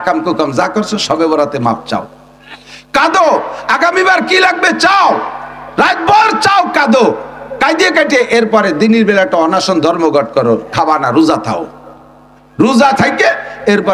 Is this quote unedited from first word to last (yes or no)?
yes